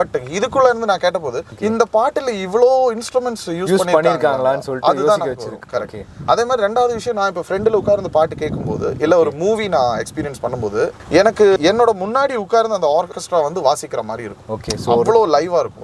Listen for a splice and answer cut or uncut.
uncut